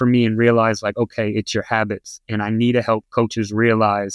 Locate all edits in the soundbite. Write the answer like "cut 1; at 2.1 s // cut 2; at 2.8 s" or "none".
none